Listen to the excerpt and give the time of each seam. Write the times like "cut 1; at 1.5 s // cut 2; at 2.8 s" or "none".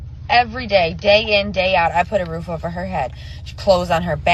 cut 1; at 1.5 s